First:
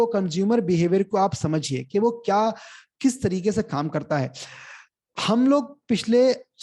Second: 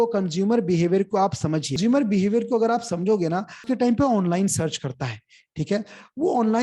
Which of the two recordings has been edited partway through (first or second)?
second